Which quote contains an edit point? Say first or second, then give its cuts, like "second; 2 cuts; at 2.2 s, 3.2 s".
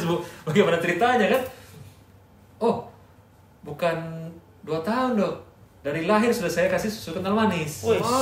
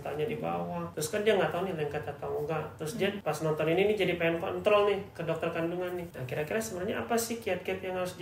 second; 3 cuts; at 0.9 s, 3.2 s, 6.1 s